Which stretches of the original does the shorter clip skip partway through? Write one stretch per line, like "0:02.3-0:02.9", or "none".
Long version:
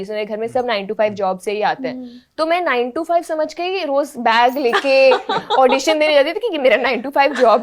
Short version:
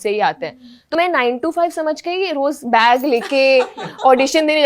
0:02.4-0:02.5